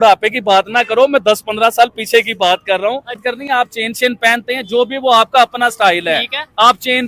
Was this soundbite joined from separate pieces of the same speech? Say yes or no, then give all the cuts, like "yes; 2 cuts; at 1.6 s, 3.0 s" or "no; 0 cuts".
yes; 1 cut; at 3.2 s